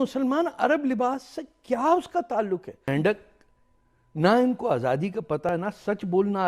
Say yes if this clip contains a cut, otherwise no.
yes